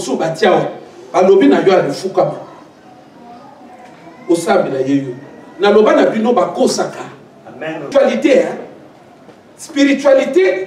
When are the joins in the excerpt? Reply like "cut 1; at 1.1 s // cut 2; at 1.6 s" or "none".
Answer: cut 1; at 7.9 s